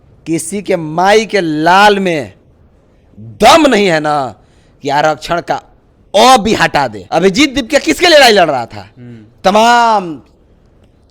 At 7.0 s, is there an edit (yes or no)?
yes